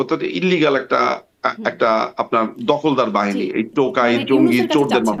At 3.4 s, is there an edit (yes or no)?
no